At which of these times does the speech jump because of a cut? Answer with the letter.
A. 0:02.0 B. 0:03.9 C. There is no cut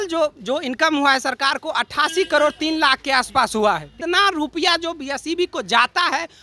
B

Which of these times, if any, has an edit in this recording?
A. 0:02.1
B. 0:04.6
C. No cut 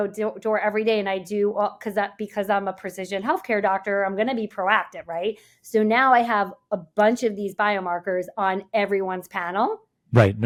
C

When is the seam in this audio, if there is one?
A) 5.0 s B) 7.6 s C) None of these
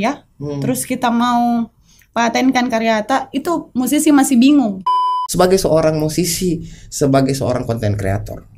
A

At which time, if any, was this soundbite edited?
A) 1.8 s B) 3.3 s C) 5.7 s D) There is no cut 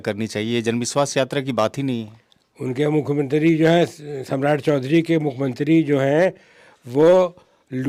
D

